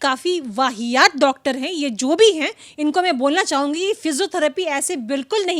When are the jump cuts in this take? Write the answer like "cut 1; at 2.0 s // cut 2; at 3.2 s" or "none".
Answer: none